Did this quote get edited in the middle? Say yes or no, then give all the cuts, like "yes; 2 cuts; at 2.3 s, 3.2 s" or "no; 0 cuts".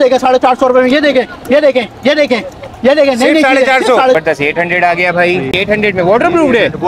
yes; 1 cut; at 4.2 s